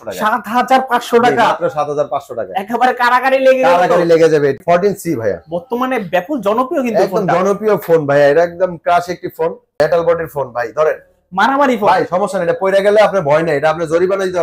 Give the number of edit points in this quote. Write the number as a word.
two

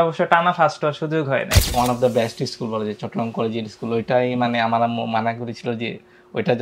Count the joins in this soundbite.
one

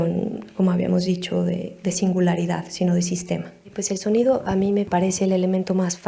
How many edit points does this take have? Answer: two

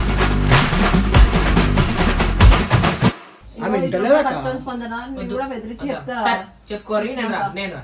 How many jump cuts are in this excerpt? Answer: one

